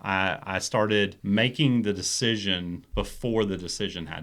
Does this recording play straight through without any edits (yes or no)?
no